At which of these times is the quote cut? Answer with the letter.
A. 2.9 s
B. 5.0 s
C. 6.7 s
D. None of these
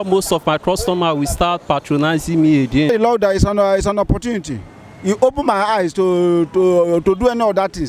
A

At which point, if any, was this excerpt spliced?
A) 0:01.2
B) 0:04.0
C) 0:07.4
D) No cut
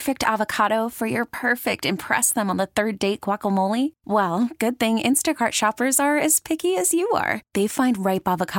D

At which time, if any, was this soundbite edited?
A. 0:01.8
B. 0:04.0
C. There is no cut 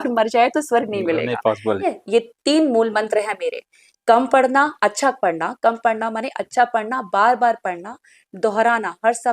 A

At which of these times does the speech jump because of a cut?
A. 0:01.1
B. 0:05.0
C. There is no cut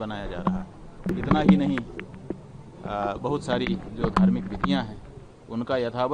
A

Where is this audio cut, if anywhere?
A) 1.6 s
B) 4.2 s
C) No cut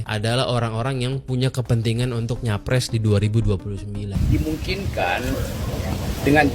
B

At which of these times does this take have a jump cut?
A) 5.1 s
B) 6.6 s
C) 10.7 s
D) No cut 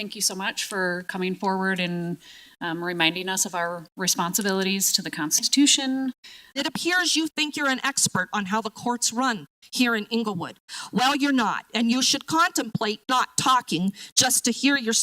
B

